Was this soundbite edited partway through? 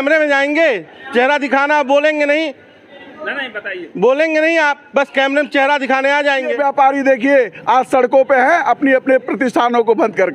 yes; 1 cut; at 6.6 s

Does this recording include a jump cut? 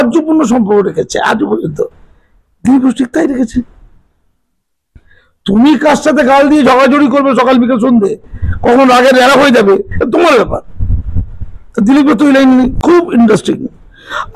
yes; 1 cut; at 12.8 s

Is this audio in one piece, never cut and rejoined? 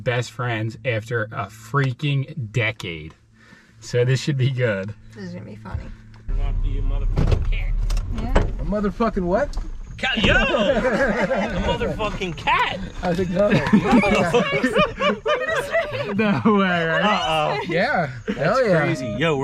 no; 2 cuts; at 3.4 s, 6.3 s

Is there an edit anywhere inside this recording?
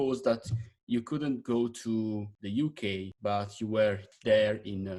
no; 0 cuts

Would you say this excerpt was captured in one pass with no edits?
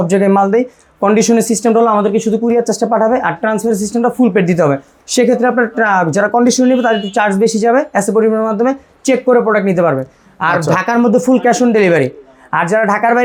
yes; 0 cuts

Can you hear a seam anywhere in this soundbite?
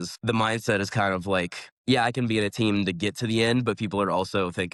no; 0 cuts

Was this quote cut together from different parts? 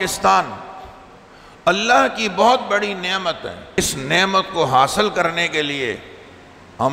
yes; 1 cut; at 3.8 s

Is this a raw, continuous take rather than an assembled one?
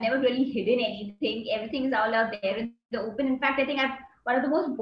yes; 0 cuts

